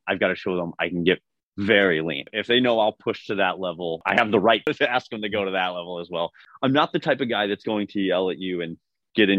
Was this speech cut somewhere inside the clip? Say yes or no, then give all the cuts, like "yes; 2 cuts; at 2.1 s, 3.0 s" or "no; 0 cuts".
yes; 4 cuts; at 2.2 s, 4.0 s, 4.7 s, 6.4 s